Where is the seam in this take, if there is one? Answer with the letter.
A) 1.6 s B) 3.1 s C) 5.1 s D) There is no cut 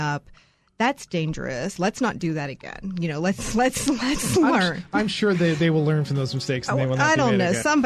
D